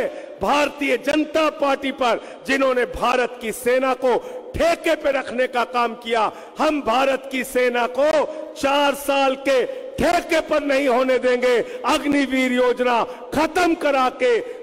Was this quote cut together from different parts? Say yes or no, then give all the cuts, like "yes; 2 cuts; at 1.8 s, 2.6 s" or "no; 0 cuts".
no; 0 cuts